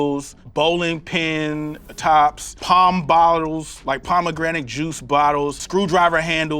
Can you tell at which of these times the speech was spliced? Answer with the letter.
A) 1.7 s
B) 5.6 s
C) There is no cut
B